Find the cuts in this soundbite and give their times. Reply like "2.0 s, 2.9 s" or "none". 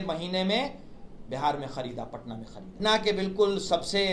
2.7 s